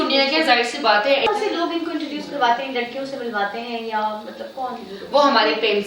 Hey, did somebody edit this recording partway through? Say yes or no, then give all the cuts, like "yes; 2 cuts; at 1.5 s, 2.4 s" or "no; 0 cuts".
yes; 1 cut; at 1.3 s